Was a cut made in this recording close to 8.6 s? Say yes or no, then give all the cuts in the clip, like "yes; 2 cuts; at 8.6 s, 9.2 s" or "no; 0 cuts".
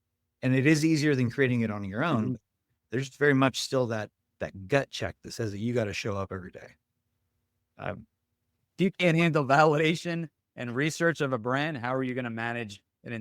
yes; 1 cut; at 8.6 s